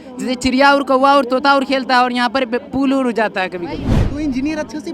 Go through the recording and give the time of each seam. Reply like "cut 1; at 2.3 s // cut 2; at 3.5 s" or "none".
cut 1; at 4.0 s